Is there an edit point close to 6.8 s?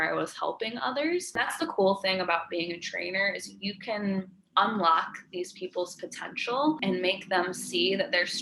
yes; 2 cuts; at 1.5 s, 6.8 s

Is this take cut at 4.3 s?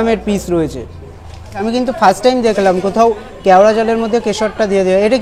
no; 1 cut; at 1.7 s

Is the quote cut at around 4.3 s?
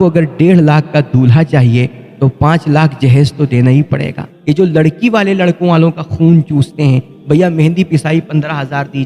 yes; 1 cut; at 4.3 s

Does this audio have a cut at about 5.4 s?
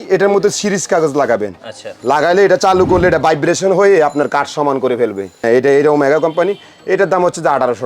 yes; 1 cut; at 5.4 s

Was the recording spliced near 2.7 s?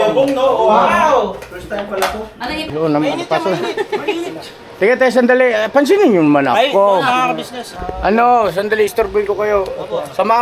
yes; 1 cut; at 2.7 s

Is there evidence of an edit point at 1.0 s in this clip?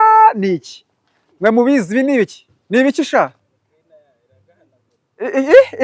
no; 0 cuts

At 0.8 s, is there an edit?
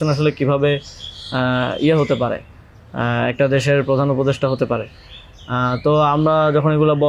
no; 0 cuts

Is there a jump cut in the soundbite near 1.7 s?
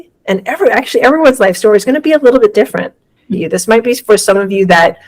no; 1 cut; at 3.2 s

